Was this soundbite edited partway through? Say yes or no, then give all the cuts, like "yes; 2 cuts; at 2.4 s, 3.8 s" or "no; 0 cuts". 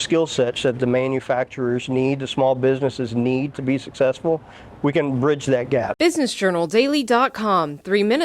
yes; 1 cut; at 5.9 s